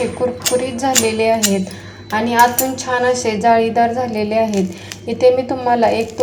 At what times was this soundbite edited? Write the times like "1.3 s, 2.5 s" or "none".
none